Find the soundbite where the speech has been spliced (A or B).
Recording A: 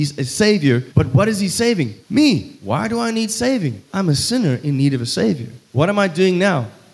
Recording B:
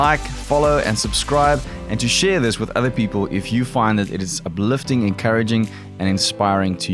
A